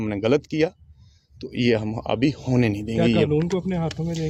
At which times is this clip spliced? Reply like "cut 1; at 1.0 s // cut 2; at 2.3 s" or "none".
none